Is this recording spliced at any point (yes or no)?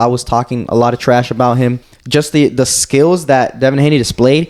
yes